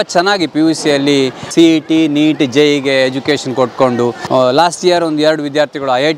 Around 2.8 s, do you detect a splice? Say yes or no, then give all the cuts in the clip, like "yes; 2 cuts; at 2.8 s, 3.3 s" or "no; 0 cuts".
no; 2 cuts; at 1.5 s, 4.2 s